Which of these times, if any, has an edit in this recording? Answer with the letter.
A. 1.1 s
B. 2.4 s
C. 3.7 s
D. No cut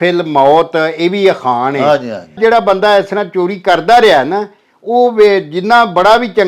B